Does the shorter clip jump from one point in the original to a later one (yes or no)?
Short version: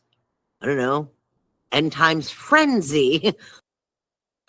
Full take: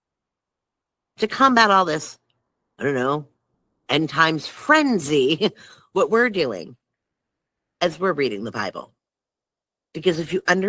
yes